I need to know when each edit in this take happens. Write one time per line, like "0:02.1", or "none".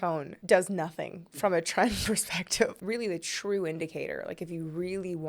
0:02.8